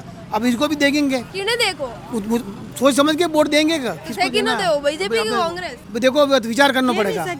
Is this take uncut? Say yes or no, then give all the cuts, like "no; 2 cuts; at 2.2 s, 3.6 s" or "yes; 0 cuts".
yes; 0 cuts